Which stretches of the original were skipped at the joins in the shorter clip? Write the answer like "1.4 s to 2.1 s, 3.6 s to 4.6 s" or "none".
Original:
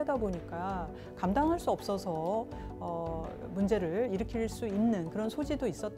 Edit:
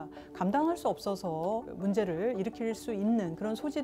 2.5 s to 3.5 s